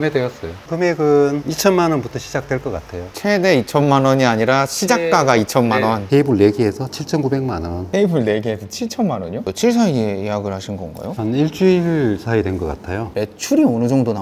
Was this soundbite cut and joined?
yes; 1 cut; at 6.0 s

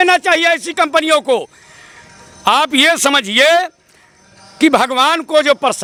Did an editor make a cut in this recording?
no; 0 cuts

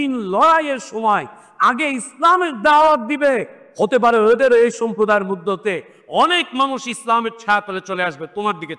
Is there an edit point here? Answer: yes; 1 cut; at 3.6 s

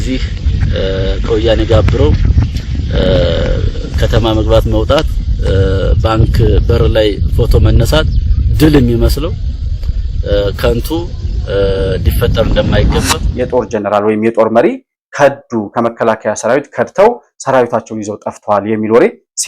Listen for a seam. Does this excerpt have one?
yes; 1 cut; at 13.3 s

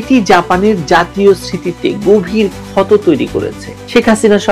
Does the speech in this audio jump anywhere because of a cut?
no; 0 cuts

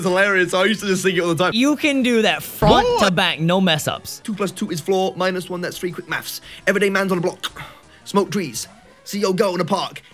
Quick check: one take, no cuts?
no; 2 cuts; at 1.5 s, 4.2 s

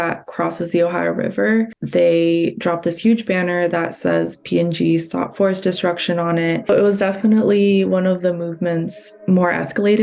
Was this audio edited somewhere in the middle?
yes; 2 cuts; at 1.8 s, 6.7 s

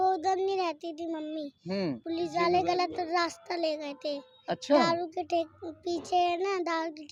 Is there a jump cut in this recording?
no; 0 cuts

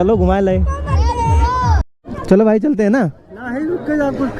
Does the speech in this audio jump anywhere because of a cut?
yes; 1 cut; at 1.9 s

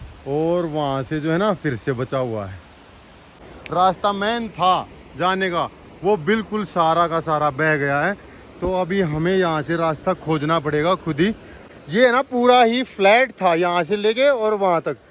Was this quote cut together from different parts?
yes; 2 cuts; at 3.6 s, 11.6 s

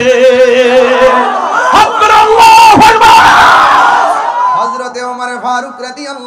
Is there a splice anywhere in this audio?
yes; 1 cut; at 4.6 s

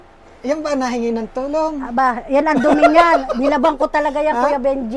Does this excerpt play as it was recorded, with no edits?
yes; 0 cuts

